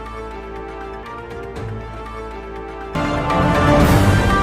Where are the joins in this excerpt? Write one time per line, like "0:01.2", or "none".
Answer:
0:01.0
0:02.9